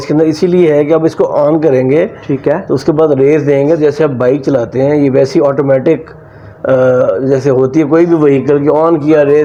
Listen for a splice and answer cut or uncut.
uncut